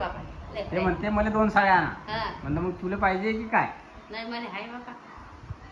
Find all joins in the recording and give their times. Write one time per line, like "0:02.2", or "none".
none